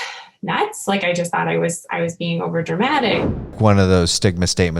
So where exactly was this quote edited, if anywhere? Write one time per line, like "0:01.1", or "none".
0:03.5